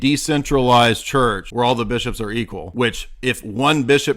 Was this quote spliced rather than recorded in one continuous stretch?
yes; 2 cuts; at 1.4 s, 2.6 s

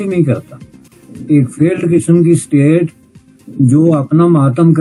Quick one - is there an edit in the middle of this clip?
no; 0 cuts

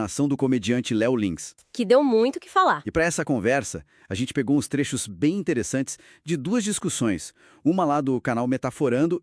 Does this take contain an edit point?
no; 0 cuts

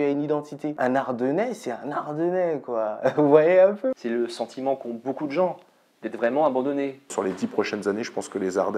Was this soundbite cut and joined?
yes; 3 cuts; at 0.8 s, 4.0 s, 7.1 s

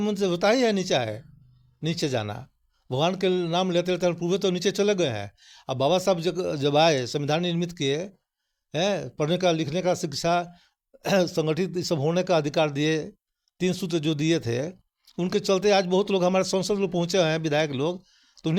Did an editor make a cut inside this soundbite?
no; 0 cuts

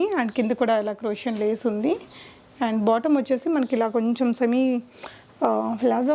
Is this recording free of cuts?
yes; 0 cuts

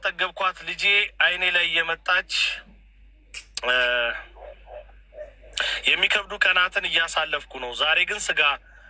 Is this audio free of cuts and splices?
yes; 0 cuts

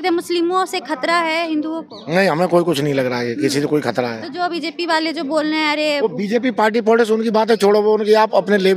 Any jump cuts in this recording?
no; 0 cuts

